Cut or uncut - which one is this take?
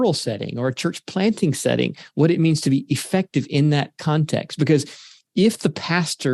uncut